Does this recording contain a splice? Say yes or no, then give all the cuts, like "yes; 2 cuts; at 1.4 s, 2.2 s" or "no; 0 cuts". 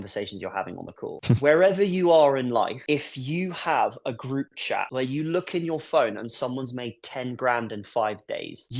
yes; 1 cut; at 1.1 s